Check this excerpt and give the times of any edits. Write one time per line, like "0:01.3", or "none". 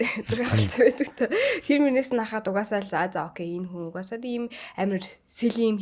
none

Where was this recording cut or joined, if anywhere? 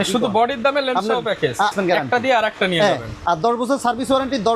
0:01.7

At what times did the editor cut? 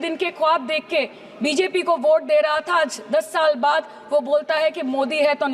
none

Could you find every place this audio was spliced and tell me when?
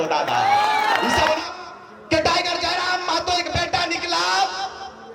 0:01.4

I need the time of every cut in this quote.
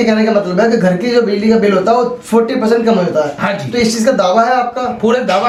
none

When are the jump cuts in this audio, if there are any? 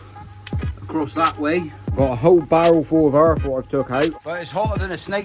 0:01.8
0:04.2

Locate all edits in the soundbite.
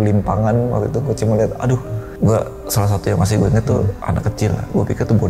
0:02.0

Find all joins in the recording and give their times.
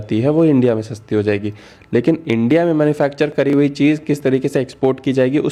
none

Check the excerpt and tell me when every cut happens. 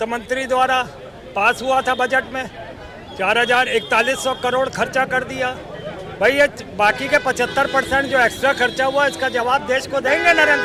none

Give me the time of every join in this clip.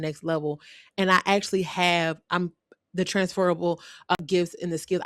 0:04.2

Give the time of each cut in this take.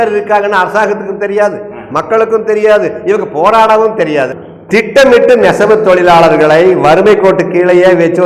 0:04.4

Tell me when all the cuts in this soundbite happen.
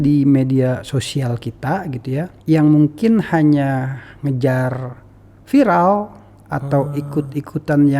0:02.4

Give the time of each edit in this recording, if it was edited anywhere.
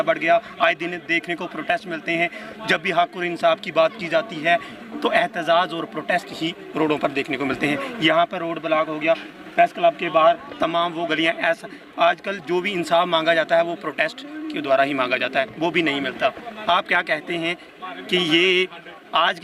none

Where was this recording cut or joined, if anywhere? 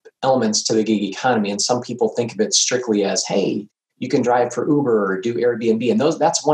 none

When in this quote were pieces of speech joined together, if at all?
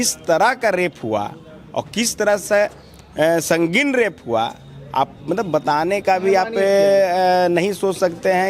none

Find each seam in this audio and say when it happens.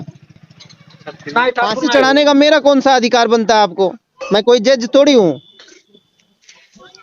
0:01.7

